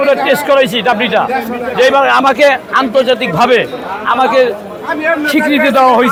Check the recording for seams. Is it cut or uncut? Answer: uncut